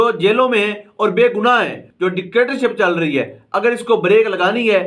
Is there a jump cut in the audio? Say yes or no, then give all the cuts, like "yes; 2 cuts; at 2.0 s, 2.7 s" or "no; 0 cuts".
yes; 1 cut; at 1.8 s